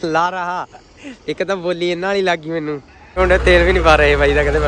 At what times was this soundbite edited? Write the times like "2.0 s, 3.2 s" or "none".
3.0 s